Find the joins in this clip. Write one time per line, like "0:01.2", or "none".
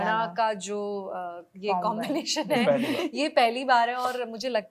none